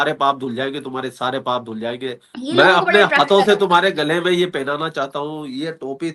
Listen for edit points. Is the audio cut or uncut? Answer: cut